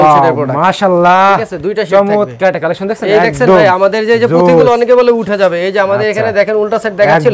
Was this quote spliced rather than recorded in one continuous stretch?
no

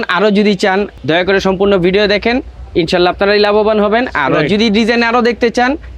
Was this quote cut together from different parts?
yes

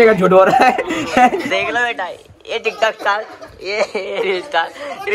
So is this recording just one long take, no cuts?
no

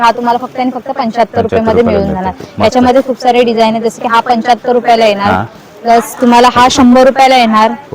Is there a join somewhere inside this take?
no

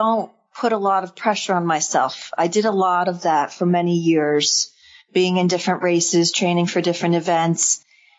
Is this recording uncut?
yes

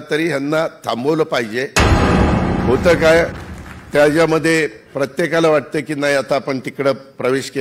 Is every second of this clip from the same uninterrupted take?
no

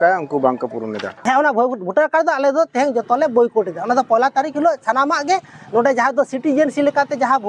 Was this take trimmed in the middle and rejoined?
yes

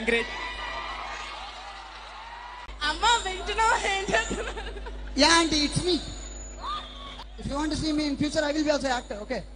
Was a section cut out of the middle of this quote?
yes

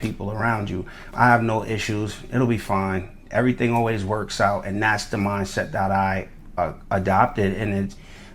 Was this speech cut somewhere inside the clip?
yes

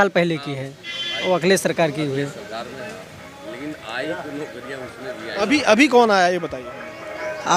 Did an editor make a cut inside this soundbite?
no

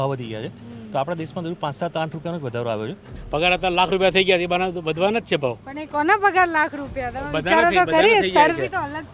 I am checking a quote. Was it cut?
yes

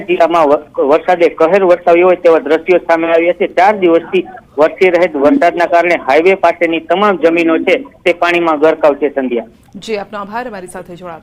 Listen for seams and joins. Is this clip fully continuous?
yes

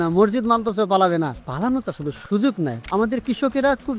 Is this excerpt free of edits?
no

